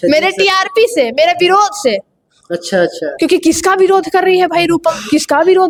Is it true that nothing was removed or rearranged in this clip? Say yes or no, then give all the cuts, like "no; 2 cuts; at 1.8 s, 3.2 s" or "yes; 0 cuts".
yes; 0 cuts